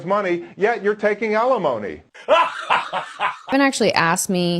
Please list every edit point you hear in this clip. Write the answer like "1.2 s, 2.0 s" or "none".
2.1 s, 3.5 s